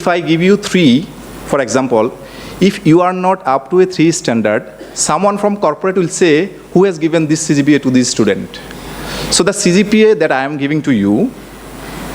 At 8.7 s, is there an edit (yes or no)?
no